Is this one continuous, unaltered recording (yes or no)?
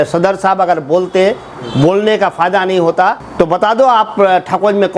no